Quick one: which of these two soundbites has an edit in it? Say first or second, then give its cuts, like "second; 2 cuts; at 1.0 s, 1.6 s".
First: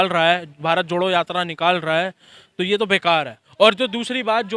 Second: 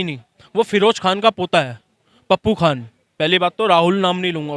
first; 1 cut; at 3.4 s